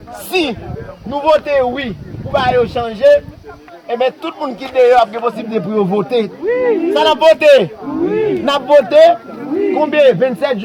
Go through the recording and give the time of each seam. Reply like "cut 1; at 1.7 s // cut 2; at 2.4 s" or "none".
cut 1; at 6.3 s